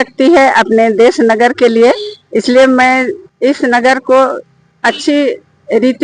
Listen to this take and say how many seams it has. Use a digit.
1